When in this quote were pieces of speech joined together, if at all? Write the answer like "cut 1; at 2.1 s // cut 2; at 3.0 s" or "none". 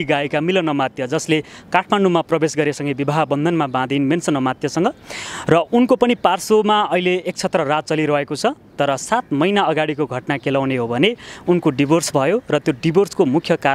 none